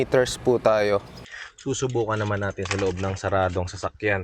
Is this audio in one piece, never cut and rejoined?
no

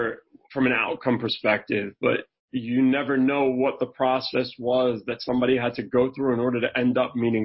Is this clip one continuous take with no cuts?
yes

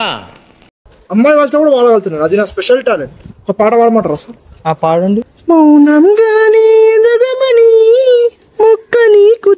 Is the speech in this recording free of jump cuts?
no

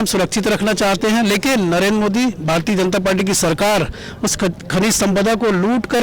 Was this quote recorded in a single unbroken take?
yes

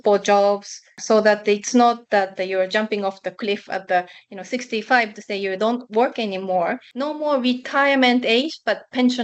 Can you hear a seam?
yes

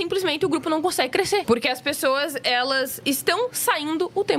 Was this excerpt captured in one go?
no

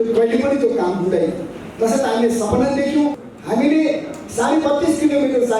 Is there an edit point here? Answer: yes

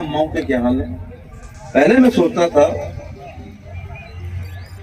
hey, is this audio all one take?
yes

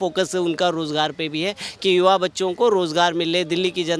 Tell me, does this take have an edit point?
no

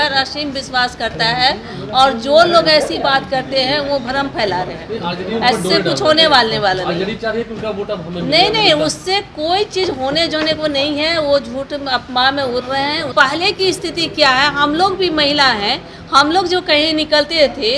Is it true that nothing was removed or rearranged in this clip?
no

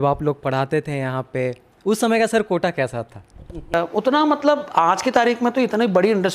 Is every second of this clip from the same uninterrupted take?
no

